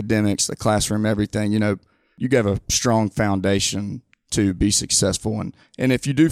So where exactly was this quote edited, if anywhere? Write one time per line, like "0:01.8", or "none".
0:02.1